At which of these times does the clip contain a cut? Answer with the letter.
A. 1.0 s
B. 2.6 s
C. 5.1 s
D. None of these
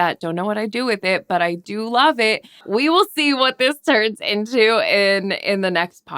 B